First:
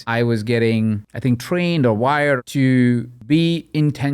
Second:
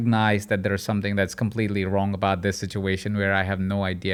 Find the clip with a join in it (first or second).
first